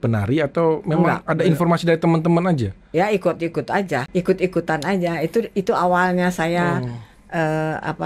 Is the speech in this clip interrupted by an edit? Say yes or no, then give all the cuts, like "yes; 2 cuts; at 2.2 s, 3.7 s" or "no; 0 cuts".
yes; 1 cut; at 4.1 s